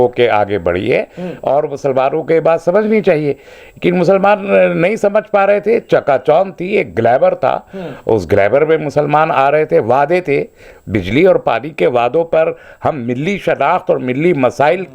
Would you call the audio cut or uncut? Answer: uncut